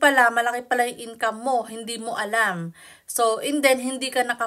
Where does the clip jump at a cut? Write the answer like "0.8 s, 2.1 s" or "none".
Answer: none